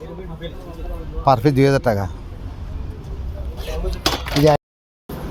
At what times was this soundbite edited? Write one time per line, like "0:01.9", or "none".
none